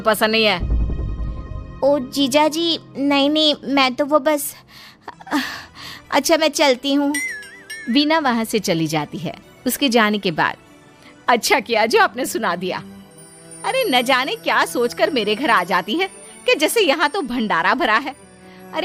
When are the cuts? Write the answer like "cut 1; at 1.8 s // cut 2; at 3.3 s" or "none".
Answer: none